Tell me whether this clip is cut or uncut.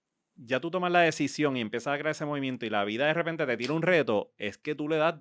uncut